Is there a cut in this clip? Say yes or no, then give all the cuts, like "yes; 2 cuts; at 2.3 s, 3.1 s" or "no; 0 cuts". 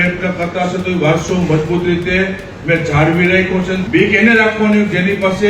yes; 1 cut; at 3.8 s